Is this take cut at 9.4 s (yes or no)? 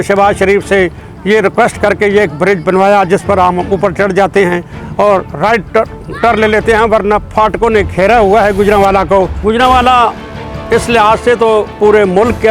yes